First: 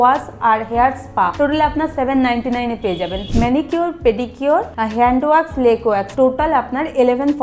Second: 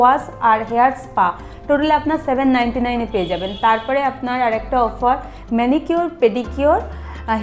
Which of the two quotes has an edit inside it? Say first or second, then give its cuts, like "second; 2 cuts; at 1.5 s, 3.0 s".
first; 4 cuts; at 1.3 s, 3.2 s, 4.8 s, 6.1 s